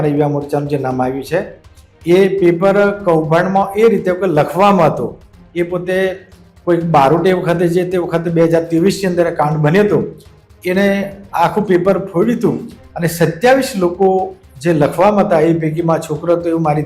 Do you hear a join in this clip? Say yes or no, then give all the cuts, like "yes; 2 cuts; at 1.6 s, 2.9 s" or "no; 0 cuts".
no; 0 cuts